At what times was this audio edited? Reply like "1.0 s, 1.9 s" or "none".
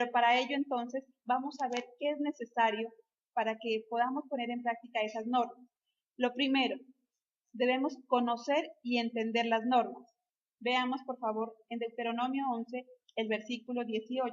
10.1 s